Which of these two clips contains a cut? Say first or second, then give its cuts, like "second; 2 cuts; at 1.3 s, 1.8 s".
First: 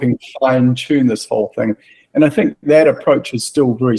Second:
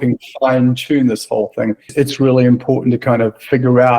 second; 1 cut; at 1.8 s